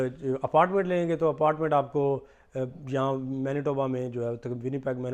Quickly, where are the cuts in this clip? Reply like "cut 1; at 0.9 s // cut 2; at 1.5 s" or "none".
none